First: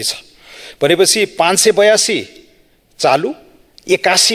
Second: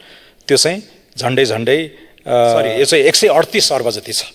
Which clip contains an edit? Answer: second; 1 cut; at 2.7 s

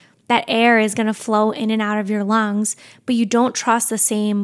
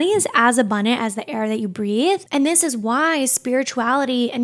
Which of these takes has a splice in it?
second; 1 cut; at 2.2 s

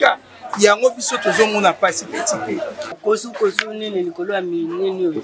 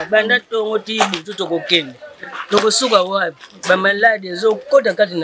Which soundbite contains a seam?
first; 1 cut; at 3.0 s

